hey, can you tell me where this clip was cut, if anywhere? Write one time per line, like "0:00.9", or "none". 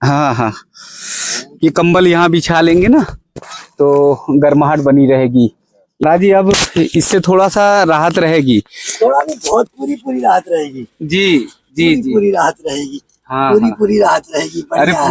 0:06.0